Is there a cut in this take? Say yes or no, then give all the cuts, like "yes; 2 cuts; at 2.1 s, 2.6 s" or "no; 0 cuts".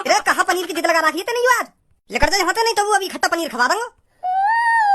yes; 1 cut; at 4.0 s